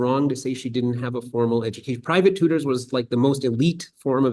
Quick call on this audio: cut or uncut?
uncut